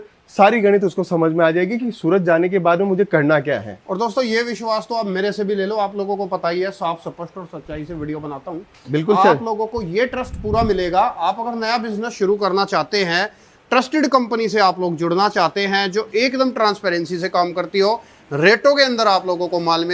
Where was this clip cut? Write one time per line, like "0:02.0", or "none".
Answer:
none